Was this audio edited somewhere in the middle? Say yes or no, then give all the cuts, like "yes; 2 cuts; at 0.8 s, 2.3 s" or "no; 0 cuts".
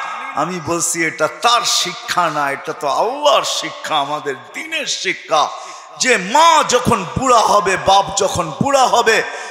no; 0 cuts